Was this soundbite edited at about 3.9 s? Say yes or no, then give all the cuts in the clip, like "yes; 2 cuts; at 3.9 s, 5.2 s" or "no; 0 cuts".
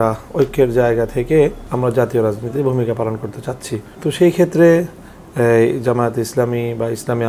yes; 2 cuts; at 1.6 s, 3.9 s